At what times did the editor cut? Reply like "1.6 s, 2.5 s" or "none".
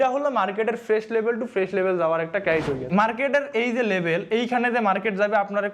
2.9 s